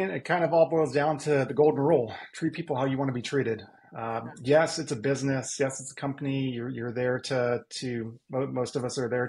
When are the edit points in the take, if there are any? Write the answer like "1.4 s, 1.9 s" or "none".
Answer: none